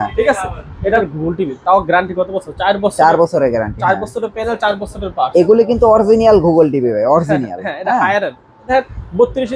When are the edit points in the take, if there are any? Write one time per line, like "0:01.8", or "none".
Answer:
0:01.0
0:08.7